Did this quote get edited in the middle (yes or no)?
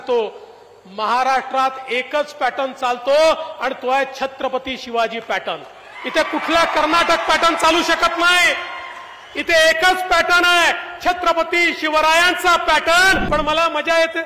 yes